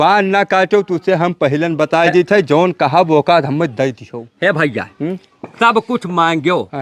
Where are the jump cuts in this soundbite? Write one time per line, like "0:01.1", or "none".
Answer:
none